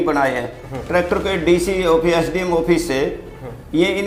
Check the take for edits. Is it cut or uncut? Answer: uncut